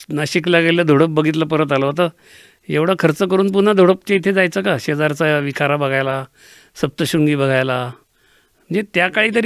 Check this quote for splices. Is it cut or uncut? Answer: uncut